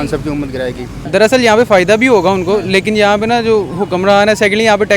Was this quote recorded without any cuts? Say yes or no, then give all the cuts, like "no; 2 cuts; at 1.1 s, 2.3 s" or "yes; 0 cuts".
no; 1 cut; at 0.9 s